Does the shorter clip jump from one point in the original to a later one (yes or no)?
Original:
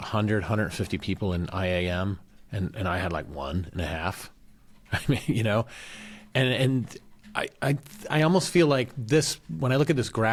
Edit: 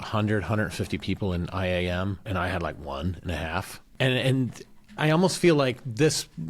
yes